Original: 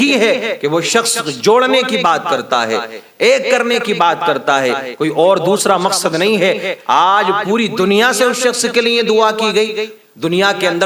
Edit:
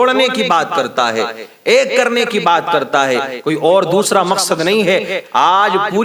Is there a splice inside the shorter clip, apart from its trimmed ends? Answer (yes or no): no